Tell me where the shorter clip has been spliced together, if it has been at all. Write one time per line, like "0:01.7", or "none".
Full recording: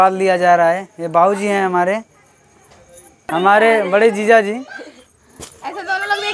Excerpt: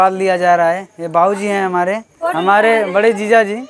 0:02.2